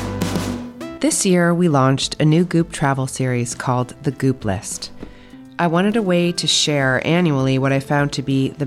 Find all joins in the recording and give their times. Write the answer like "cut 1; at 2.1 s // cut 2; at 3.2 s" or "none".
cut 1; at 0.9 s